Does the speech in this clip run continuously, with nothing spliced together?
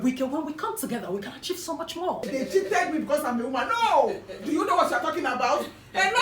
no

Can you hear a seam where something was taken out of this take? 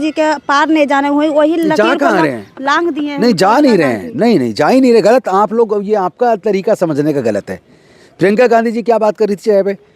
no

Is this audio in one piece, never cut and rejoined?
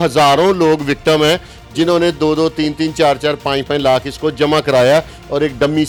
yes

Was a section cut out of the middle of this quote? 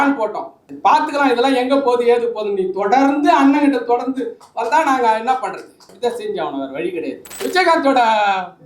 yes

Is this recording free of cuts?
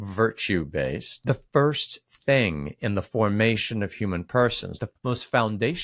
no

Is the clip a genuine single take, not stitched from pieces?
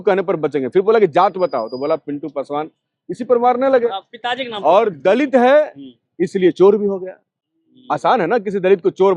yes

